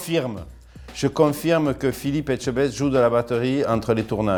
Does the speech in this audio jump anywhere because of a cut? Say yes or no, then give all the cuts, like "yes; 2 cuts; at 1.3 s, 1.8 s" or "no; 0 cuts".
no; 0 cuts